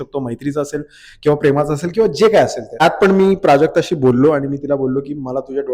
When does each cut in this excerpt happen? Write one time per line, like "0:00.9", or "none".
0:02.8